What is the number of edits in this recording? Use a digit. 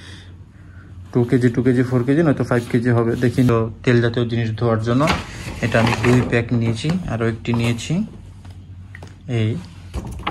1